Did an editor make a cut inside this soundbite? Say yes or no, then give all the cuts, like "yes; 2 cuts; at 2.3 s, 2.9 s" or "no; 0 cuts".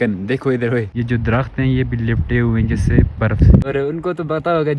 yes; 2 cuts; at 0.9 s, 3.6 s